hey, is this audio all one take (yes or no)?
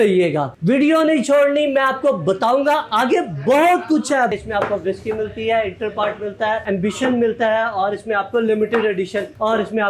no